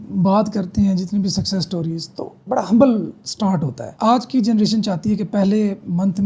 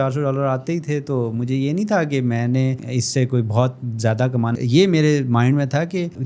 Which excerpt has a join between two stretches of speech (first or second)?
second